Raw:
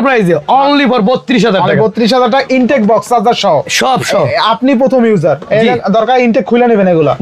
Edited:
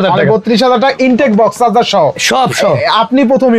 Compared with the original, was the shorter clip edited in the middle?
no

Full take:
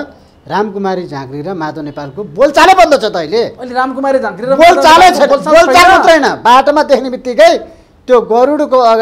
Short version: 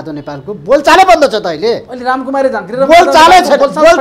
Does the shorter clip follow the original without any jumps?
yes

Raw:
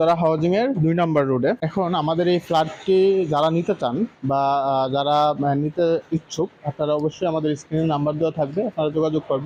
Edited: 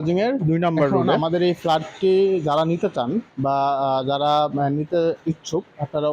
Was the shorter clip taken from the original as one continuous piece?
no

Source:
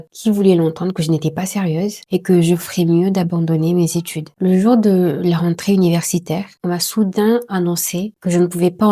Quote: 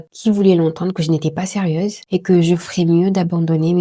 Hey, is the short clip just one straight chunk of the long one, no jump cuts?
yes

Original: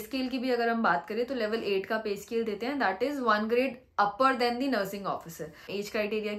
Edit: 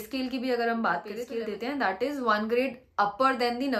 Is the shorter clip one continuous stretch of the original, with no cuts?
no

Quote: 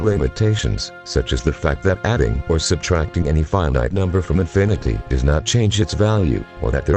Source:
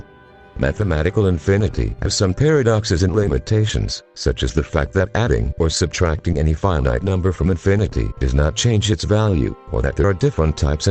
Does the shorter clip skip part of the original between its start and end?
no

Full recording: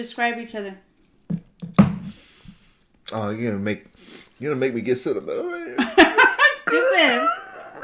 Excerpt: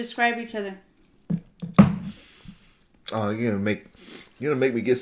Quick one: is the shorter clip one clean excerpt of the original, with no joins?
yes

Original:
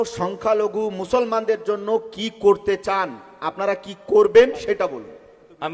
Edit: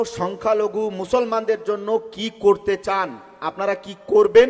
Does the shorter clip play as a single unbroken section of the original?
yes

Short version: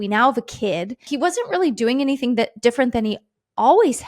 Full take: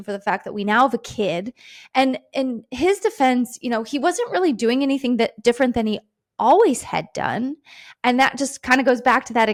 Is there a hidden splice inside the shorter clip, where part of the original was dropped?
yes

